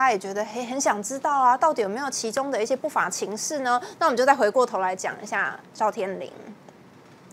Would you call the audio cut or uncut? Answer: uncut